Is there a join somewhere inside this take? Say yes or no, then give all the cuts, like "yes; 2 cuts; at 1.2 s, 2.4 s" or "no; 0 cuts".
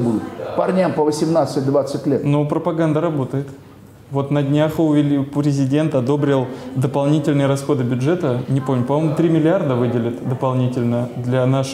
no; 0 cuts